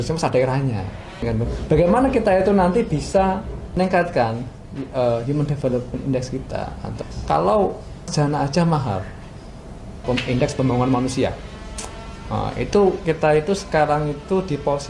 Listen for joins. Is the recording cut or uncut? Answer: cut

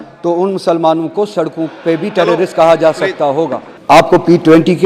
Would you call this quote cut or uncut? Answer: cut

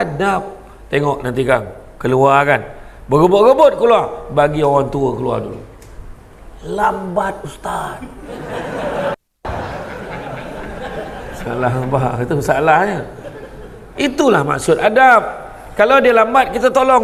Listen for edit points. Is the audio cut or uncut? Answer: uncut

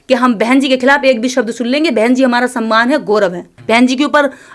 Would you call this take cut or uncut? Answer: cut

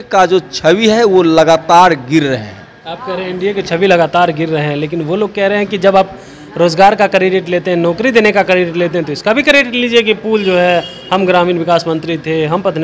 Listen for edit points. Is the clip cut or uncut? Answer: uncut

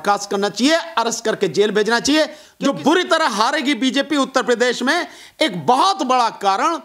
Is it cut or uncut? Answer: cut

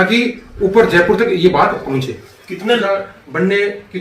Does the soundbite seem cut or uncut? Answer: cut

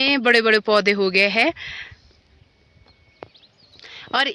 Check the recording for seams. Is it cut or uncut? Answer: uncut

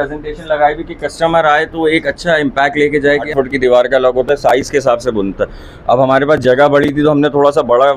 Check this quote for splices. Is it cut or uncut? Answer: cut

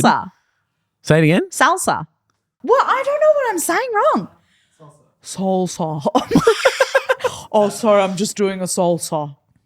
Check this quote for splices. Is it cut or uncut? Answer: cut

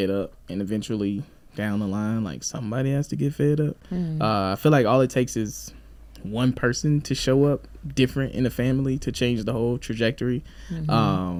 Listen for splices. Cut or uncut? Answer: uncut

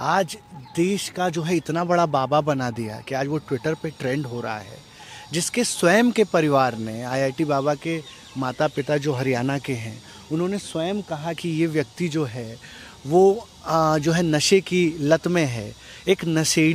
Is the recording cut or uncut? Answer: uncut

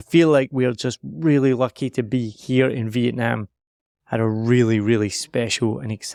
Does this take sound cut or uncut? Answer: uncut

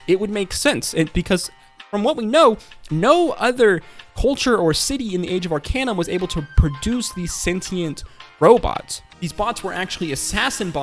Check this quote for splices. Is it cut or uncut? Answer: cut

